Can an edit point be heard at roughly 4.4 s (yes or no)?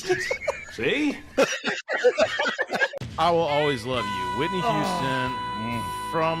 no